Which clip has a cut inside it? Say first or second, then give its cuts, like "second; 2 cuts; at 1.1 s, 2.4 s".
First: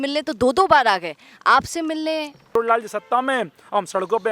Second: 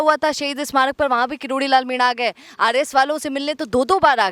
first; 1 cut; at 2.5 s